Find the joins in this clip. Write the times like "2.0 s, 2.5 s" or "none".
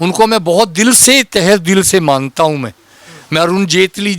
none